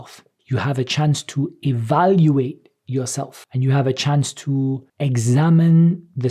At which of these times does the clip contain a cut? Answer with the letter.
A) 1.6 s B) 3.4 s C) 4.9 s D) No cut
D